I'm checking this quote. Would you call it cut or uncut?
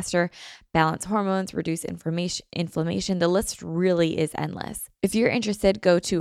cut